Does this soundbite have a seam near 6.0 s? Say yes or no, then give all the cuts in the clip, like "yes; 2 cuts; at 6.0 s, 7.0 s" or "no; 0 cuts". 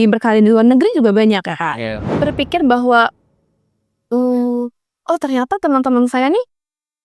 no; 1 cut; at 2.0 s